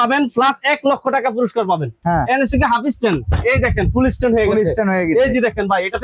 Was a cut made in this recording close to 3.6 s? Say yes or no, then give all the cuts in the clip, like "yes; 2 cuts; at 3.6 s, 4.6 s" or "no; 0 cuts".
no; 1 cut; at 1.9 s